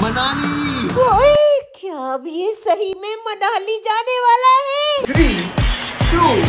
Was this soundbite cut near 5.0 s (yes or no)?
yes